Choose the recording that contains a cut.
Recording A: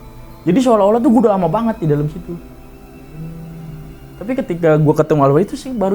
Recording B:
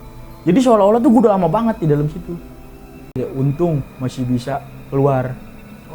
B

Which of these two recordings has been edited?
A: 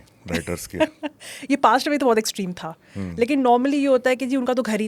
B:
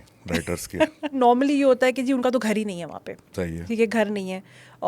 B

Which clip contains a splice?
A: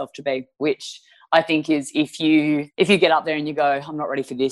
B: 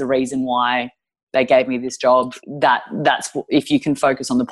B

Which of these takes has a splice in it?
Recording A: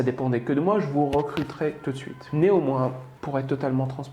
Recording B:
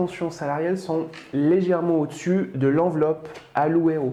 A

